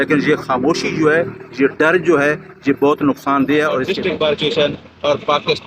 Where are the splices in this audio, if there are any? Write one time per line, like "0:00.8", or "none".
0:03.9